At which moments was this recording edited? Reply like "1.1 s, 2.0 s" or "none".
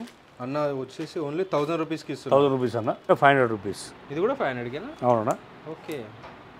3.1 s